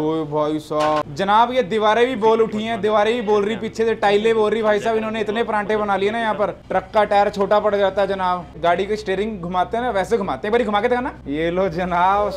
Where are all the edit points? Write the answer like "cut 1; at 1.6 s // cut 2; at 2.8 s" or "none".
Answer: cut 1; at 1.1 s // cut 2; at 6.6 s // cut 3; at 8.5 s // cut 4; at 11.2 s